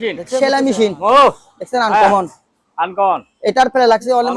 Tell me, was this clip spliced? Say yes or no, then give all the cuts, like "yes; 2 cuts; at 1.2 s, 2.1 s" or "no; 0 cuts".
no; 0 cuts